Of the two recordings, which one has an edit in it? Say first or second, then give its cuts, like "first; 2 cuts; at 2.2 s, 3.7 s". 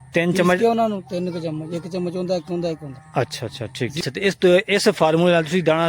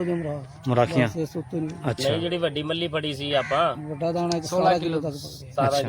first; 1 cut; at 4.0 s